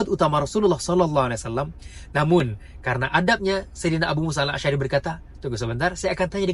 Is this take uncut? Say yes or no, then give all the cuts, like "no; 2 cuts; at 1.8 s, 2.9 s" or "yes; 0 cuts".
yes; 0 cuts